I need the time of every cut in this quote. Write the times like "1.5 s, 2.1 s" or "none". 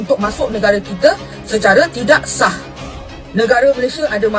none

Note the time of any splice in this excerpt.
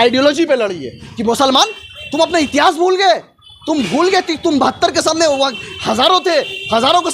1.1 s

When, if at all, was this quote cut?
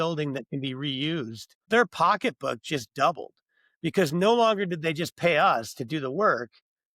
1.7 s

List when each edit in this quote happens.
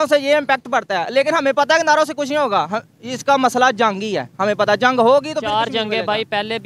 none

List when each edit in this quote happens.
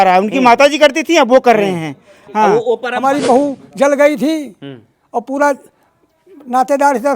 2.9 s

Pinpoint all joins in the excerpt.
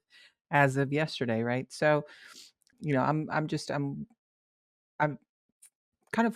2.7 s

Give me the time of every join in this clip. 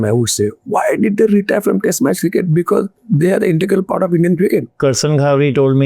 4.7 s

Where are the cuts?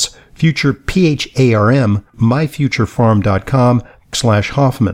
2.1 s, 4.0 s

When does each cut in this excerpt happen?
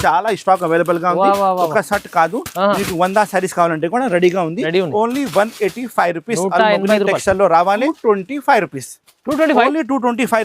7.9 s

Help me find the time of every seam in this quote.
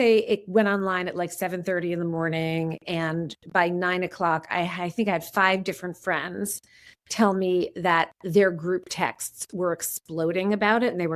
none

